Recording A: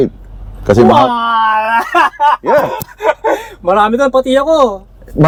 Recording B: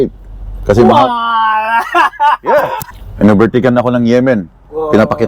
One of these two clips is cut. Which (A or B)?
B